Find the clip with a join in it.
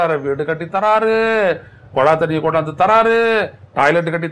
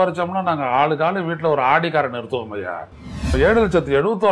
second; 1 cut; at 3.4 s

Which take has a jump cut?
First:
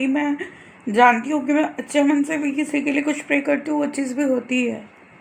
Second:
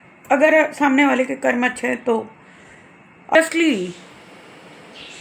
second; 1 cut; at 3.3 s

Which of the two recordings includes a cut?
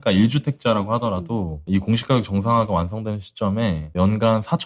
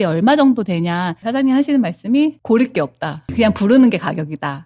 second; 3 cuts; at 1.2 s, 2.4 s, 3.3 s

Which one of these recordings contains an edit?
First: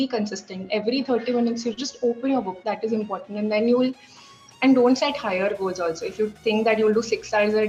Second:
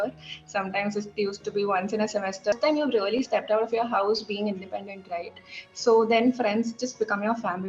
second; 1 cut; at 2.5 s

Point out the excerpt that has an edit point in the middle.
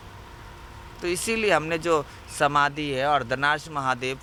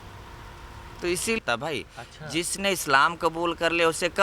second; 1 cut; at 1.4 s

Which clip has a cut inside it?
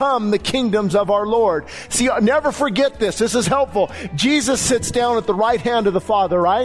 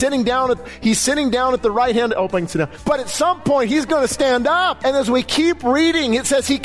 second; 2 cuts; at 2.8 s, 4.8 s

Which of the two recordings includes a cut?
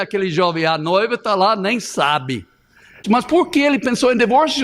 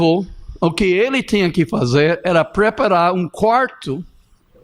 first; 1 cut; at 3.0 s

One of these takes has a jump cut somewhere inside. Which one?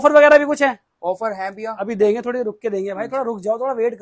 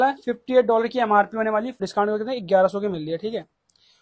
second; 1 cut; at 1.8 s

